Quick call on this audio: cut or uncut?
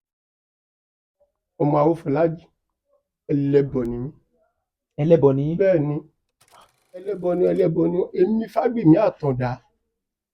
cut